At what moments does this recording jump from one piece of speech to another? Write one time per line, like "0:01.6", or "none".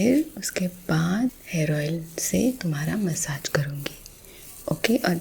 0:01.3